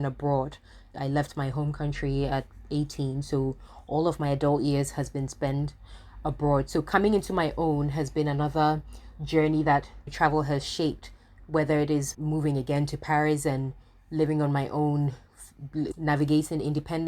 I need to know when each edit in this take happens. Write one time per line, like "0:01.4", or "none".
0:00.9
0:12.1